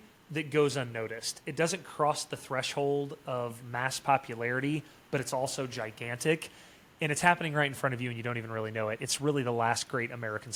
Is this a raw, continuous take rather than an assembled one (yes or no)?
yes